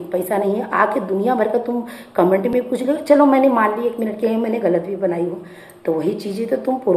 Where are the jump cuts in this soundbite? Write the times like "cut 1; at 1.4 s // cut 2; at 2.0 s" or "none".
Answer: none